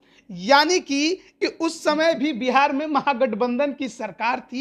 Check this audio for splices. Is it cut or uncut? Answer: cut